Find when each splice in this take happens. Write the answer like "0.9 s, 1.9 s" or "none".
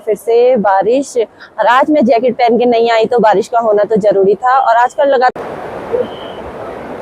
5.4 s